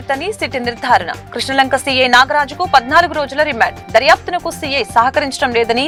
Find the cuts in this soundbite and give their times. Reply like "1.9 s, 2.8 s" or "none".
none